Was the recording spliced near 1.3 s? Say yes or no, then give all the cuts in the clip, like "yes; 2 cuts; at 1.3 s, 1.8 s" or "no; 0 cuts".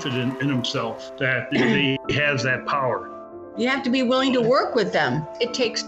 yes; 2 cuts; at 1.3 s, 3.4 s